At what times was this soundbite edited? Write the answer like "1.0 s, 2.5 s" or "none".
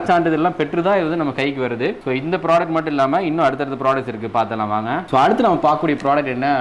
none